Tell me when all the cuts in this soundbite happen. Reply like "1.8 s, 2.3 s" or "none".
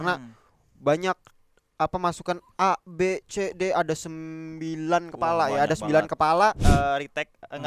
6.6 s